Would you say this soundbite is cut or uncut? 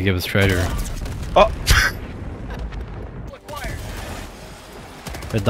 cut